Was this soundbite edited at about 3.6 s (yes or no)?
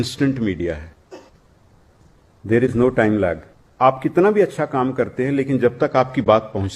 yes